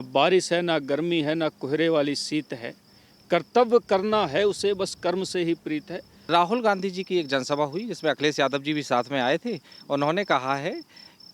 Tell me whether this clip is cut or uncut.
cut